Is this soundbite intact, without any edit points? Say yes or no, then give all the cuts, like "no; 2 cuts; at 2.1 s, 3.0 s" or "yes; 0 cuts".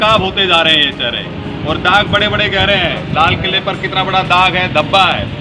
yes; 0 cuts